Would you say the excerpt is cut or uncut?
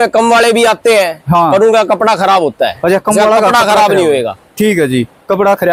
uncut